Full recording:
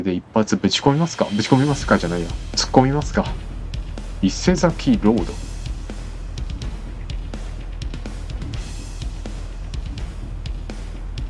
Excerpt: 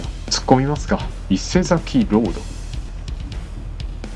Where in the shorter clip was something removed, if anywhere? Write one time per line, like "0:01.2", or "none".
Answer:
0:01.1
0:02.9